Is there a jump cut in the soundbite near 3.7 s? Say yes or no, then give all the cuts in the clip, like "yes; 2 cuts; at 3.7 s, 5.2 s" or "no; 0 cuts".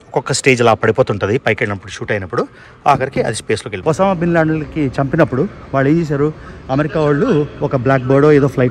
yes; 1 cut; at 3.7 s